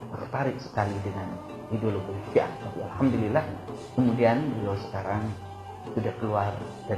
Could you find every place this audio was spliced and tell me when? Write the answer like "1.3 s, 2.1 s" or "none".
5.1 s